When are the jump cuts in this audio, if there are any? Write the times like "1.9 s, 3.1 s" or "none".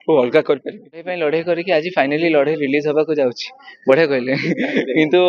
1.1 s